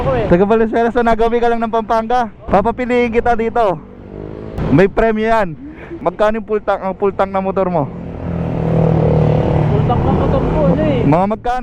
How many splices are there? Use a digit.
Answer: 3